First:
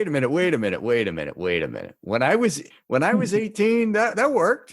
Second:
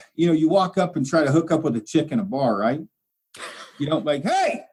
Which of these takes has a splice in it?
first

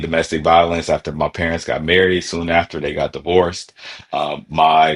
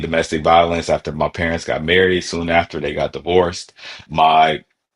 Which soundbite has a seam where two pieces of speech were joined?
second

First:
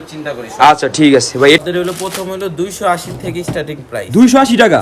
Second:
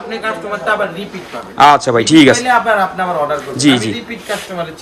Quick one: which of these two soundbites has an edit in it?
first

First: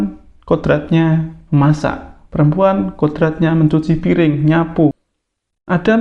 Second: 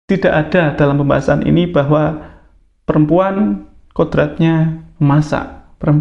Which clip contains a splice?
first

